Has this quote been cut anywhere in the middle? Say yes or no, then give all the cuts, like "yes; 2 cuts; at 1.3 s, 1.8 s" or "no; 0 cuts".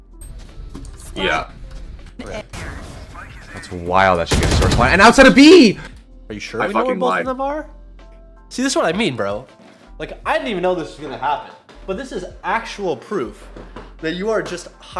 no; 0 cuts